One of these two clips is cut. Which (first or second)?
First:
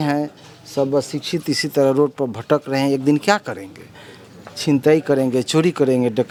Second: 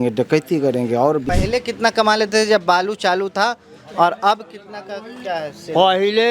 second